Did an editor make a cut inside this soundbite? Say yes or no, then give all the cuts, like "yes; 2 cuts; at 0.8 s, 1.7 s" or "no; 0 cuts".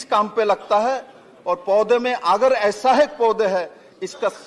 no; 0 cuts